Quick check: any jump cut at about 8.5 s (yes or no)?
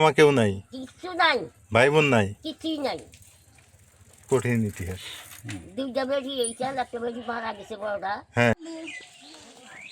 yes